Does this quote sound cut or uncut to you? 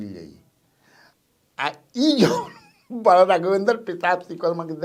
uncut